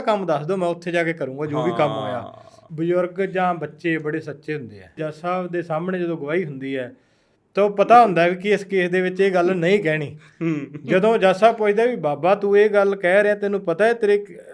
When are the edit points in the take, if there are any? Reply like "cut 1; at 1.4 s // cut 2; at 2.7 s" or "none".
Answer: cut 1; at 2.5 s // cut 2; at 5.0 s